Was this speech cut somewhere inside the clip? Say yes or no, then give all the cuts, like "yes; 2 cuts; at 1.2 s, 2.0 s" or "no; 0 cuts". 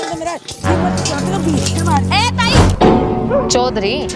yes; 1 cut; at 2.7 s